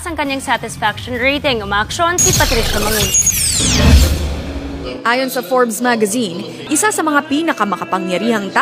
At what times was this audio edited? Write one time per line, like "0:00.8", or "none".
none